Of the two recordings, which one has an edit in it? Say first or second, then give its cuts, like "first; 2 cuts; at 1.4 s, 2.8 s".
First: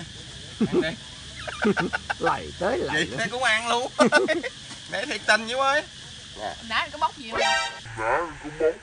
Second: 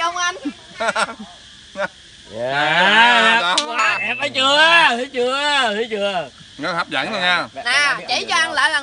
first; 1 cut; at 7.6 s